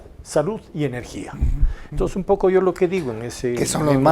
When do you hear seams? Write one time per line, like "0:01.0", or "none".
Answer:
none